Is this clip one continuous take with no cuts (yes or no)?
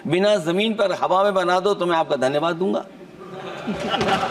yes